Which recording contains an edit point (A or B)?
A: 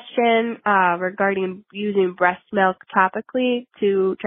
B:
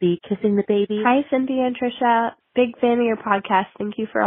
B